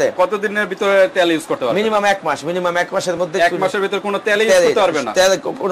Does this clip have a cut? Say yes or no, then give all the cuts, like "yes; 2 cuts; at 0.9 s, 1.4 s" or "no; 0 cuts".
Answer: no; 0 cuts